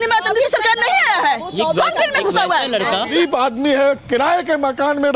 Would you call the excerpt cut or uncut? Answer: cut